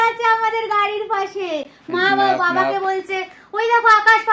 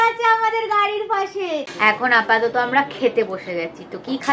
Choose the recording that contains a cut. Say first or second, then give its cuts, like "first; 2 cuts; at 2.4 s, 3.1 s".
second; 1 cut; at 1.7 s